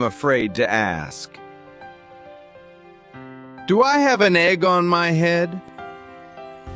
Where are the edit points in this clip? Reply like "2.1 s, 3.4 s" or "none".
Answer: 1.1 s, 3.7 s, 5.6 s